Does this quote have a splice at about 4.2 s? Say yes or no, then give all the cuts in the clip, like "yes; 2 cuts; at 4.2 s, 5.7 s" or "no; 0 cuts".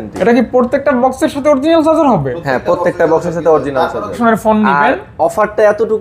yes; 1 cut; at 4.2 s